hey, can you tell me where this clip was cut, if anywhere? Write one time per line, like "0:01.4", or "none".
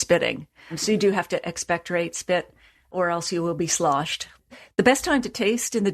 0:02.9
0:04.3